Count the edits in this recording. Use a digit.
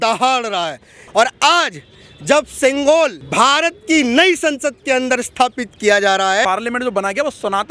3